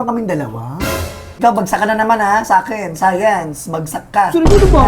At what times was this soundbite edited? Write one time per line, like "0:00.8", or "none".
0:01.3